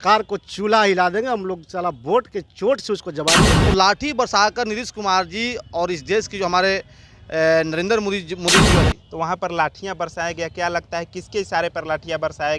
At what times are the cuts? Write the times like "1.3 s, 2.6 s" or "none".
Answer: 3.5 s, 8.9 s